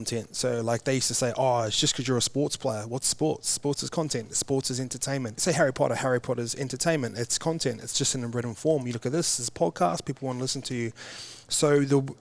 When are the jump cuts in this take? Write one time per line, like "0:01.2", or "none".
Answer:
0:05.4